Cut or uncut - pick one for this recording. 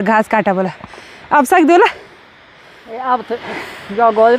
uncut